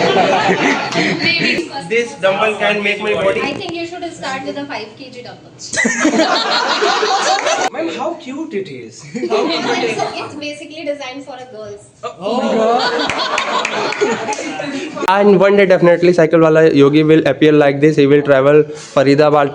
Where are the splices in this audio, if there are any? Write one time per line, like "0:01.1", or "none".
0:01.6
0:07.7
0:15.0